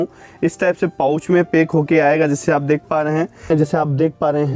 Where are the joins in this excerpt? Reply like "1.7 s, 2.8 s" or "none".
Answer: 3.6 s

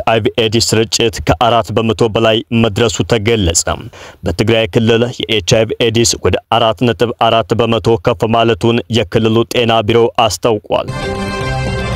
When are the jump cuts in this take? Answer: 11.0 s

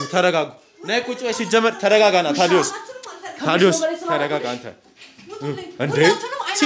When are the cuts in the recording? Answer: none

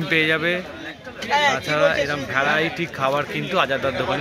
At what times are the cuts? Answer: none

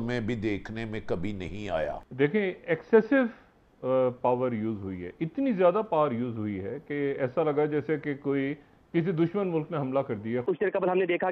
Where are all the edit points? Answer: 2.0 s, 10.4 s

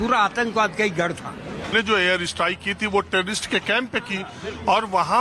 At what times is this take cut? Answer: 1.7 s

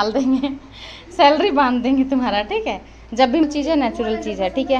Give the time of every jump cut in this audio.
3.4 s

